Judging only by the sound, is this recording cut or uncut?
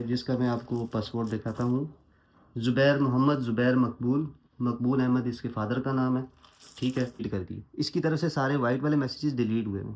cut